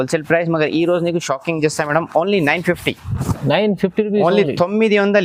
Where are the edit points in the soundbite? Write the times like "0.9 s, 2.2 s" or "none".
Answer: none